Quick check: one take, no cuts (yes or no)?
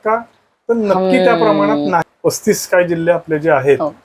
no